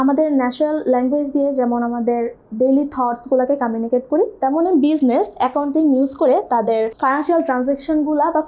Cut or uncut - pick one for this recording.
cut